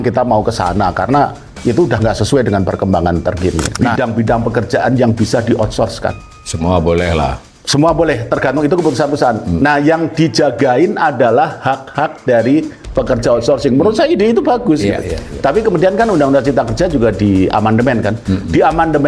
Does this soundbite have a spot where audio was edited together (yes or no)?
yes